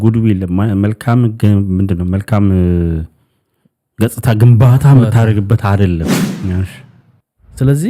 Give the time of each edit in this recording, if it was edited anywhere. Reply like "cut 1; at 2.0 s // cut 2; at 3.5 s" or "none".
cut 1; at 6.2 s